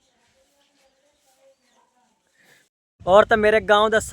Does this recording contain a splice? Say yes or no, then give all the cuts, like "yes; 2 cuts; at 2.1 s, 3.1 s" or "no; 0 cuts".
yes; 1 cut; at 2.7 s